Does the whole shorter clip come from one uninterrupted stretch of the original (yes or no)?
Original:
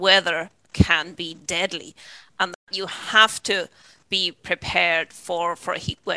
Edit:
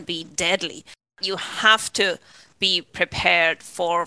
no